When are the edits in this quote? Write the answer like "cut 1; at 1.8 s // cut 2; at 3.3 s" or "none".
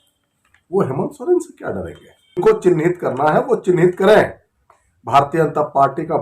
cut 1; at 2.4 s